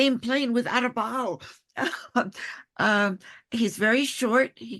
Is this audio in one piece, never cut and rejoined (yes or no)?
yes